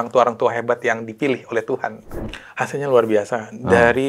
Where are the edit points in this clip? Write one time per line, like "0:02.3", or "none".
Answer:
0:02.1